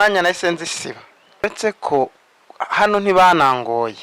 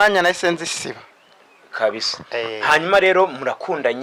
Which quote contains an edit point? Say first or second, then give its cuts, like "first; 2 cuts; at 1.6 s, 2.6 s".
first; 1 cut; at 1.4 s